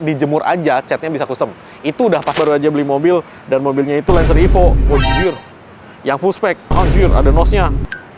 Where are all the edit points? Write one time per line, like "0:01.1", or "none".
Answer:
0:02.4